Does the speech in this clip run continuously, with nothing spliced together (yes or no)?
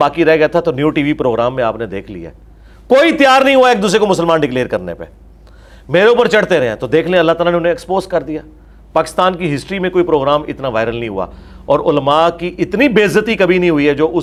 yes